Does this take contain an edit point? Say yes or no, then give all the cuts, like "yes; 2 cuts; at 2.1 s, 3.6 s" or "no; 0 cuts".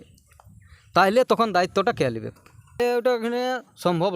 yes; 1 cut; at 2.8 s